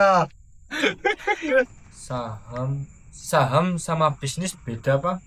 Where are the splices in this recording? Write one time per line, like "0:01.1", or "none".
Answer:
0:01.8